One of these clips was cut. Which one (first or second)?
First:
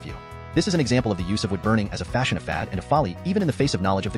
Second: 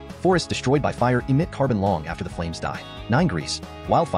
second